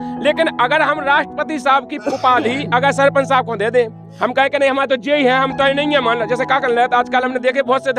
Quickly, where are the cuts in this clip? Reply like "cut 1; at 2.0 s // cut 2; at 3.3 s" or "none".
none